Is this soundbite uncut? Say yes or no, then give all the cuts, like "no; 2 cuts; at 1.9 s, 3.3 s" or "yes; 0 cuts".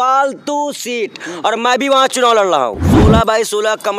no; 1 cut; at 2.9 s